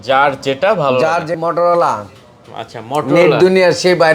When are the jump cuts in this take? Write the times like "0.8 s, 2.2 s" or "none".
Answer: 1.4 s